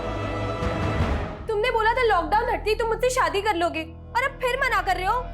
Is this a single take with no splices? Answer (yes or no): no